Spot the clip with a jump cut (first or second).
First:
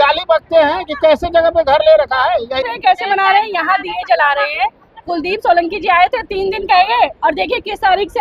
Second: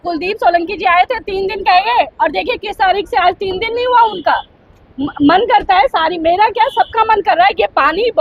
first